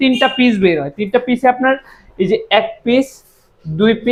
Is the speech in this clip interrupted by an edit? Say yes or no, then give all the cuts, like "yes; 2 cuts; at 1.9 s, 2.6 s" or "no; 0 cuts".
no; 0 cuts